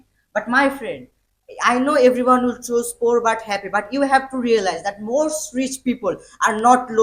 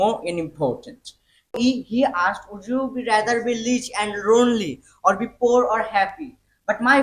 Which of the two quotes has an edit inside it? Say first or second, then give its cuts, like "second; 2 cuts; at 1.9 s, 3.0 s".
second; 1 cut; at 1.5 s